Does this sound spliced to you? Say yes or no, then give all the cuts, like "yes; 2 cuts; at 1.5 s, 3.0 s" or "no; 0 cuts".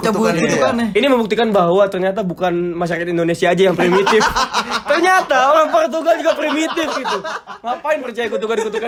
no; 0 cuts